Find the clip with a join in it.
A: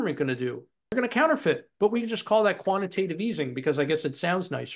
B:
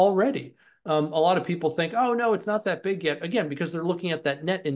A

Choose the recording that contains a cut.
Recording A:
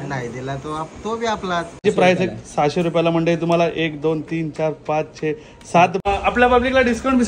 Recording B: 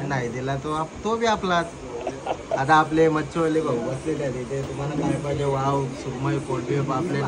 A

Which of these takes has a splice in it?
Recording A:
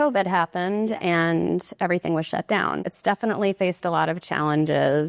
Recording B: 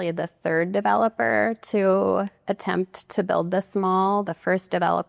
A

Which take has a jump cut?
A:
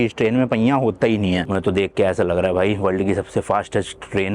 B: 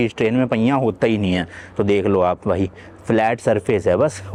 A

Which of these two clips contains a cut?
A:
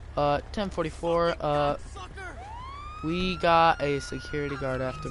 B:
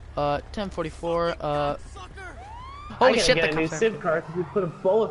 A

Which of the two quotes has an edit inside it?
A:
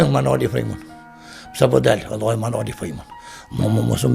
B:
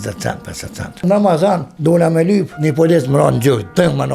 B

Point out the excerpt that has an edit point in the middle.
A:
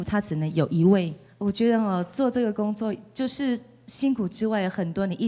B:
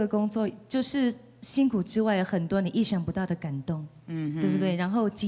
A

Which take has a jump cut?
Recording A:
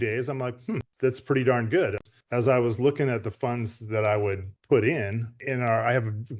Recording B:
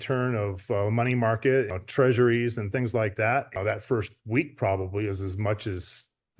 A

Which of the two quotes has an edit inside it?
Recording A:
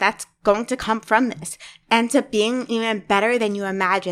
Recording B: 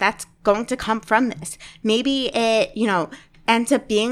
A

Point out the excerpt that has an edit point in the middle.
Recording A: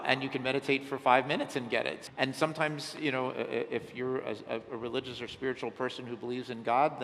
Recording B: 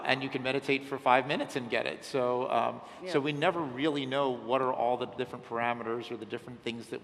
A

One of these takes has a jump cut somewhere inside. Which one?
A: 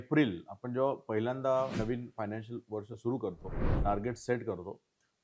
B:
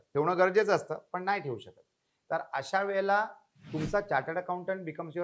A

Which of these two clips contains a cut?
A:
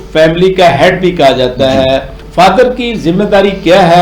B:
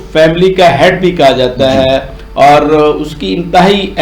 A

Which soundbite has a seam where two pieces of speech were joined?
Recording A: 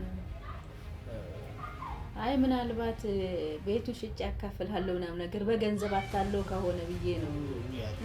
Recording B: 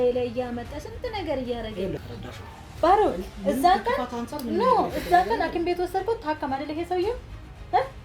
B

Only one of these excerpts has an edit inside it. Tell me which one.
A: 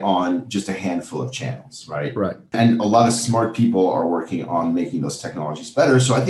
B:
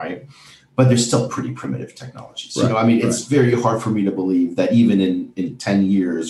A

